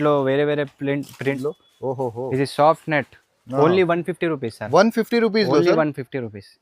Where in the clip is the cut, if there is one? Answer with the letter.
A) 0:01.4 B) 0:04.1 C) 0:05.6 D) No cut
A